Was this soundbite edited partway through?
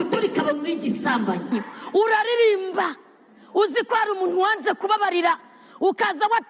yes; 1 cut; at 1.5 s

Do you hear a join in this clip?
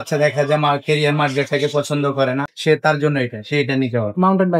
yes; 1 cut; at 2.5 s

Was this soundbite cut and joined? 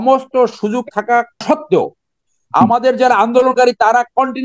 yes; 1 cut; at 1.4 s

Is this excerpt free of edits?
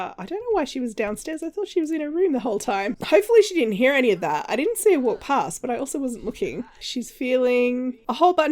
no; 2 cuts; at 3.0 s, 6.8 s

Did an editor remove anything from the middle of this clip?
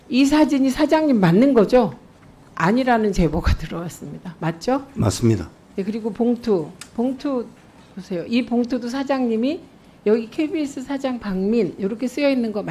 no; 0 cuts

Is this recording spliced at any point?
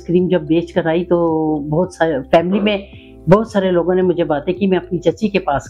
no; 0 cuts

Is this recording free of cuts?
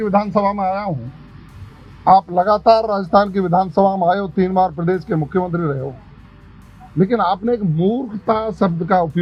yes; 0 cuts

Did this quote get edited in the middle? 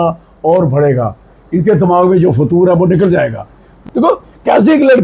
yes; 1 cut; at 3.8 s

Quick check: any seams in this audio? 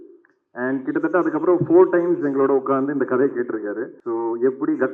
yes; 1 cut; at 3.9 s

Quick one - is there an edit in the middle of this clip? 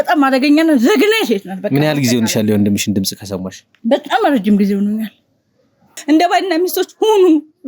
yes; 1 cut; at 5.9 s

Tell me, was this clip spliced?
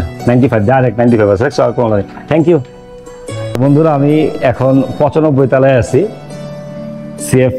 yes; 1 cut; at 3.5 s

